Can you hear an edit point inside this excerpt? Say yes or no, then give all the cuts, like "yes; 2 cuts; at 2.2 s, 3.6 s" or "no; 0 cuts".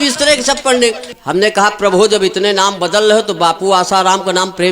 yes; 1 cut; at 1.1 s